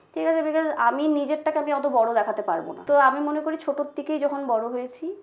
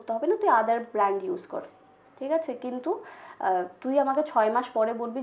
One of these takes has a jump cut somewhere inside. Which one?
first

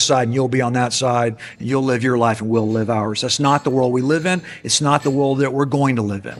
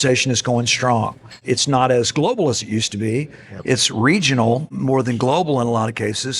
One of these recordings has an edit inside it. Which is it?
second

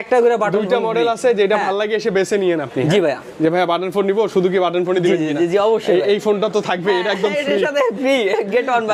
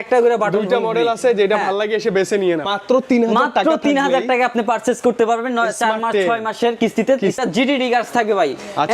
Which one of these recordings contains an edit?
second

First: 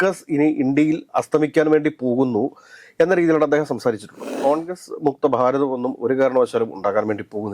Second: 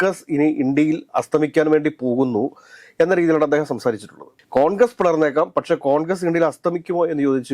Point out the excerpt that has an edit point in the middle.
first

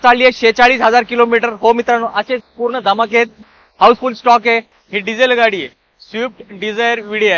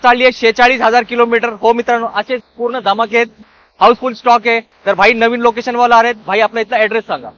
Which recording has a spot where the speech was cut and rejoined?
first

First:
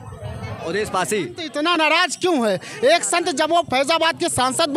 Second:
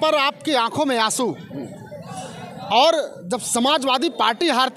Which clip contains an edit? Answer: first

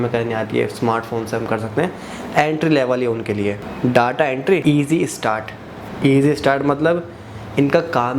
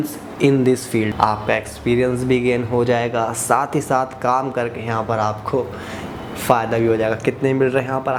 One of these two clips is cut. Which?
first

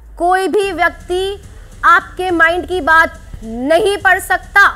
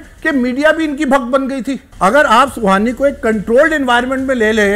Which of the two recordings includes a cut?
second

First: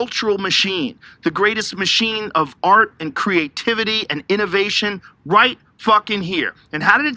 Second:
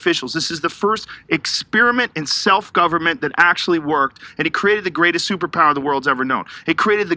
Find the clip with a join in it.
first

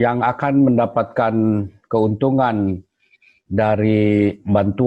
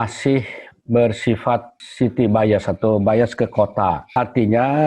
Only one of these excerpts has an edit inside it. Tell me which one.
second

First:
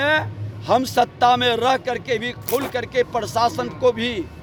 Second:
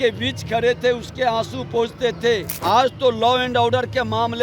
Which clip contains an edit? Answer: second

